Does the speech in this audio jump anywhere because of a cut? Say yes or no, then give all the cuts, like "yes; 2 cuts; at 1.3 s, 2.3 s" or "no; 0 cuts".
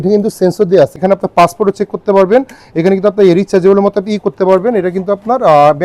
no; 0 cuts